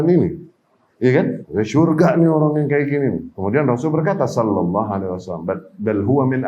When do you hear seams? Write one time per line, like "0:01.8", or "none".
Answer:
0:01.4
0:03.3